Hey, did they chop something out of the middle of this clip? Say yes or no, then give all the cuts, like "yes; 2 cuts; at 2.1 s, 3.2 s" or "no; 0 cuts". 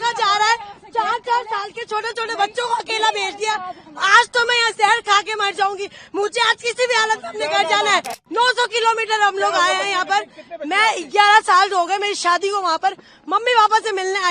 yes; 1 cut; at 8.2 s